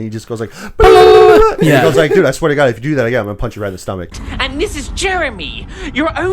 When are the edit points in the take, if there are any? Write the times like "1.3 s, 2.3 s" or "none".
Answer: 4.1 s